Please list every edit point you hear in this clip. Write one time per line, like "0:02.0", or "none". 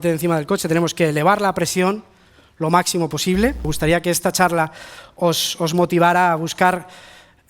0:03.7